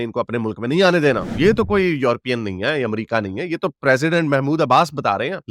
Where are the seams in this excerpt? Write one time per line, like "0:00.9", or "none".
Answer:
0:01.2